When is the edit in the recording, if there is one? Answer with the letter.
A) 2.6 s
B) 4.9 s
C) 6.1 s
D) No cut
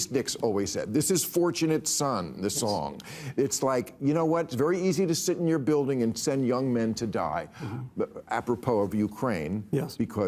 A